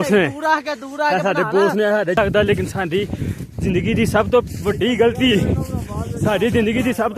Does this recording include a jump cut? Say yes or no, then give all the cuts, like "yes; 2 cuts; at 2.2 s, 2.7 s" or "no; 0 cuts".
yes; 1 cut; at 2.2 s